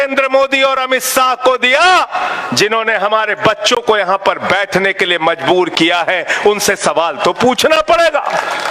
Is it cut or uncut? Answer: uncut